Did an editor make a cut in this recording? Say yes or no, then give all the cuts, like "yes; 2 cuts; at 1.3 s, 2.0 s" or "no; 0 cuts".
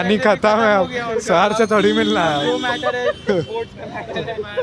no; 0 cuts